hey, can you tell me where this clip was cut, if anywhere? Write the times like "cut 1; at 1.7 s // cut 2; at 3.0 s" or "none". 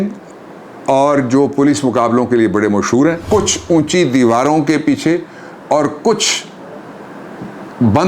cut 1; at 3.2 s